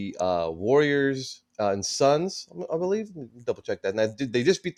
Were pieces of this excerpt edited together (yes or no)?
no